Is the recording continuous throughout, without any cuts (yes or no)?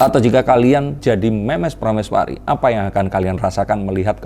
no